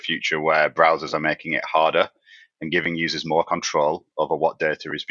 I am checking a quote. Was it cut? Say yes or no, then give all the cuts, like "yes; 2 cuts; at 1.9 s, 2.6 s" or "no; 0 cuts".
no; 0 cuts